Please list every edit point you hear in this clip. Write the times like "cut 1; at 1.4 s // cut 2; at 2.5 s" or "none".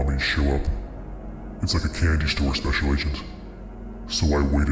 none